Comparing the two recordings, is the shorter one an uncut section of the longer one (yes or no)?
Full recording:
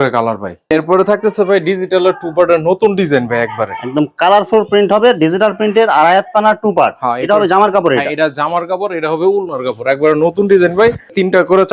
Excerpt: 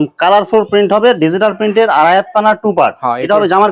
yes